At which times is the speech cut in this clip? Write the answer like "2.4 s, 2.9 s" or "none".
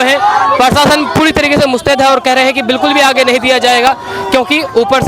none